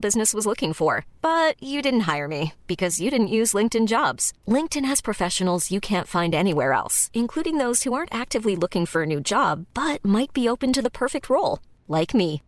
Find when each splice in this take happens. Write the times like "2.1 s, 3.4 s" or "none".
none